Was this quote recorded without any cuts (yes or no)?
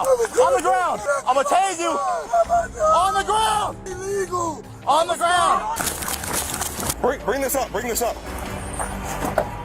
no